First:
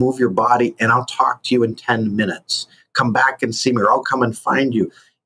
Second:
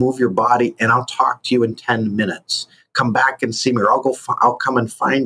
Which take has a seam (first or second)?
first